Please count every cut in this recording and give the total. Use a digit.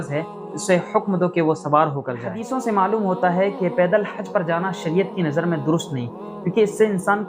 1